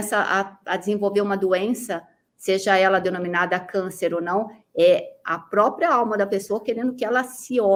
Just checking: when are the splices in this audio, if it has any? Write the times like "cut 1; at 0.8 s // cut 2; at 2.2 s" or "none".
none